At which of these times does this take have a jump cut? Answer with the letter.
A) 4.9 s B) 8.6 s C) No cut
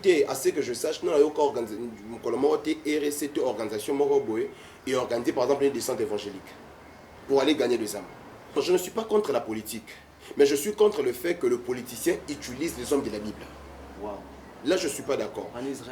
B